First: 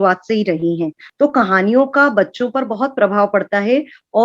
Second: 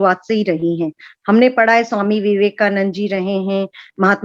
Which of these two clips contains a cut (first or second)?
first